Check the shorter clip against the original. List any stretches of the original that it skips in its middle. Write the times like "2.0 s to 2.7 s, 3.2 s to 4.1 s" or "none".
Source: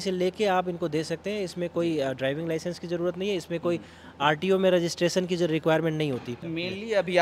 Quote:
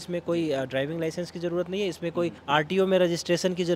3.9 s to 4.1 s